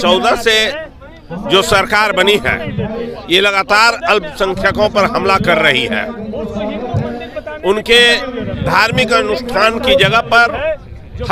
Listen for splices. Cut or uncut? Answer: uncut